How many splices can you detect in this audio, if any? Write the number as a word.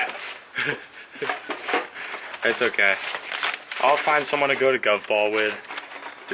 zero